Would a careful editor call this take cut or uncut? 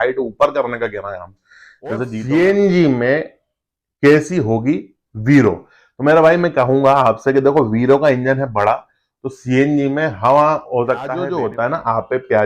cut